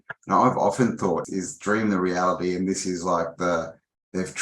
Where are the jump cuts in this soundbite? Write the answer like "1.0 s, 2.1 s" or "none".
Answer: 1.2 s